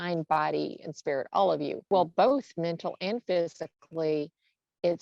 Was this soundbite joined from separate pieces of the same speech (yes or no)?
yes